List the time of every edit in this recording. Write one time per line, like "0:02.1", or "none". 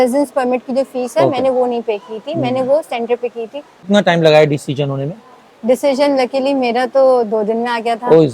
0:03.9